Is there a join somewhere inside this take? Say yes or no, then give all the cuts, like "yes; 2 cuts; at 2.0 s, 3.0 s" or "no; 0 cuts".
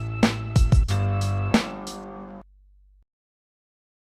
no; 0 cuts